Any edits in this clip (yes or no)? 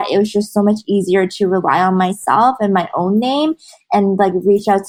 no